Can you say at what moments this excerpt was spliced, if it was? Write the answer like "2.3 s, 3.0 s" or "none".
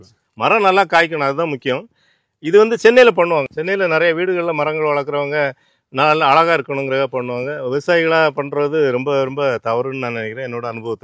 none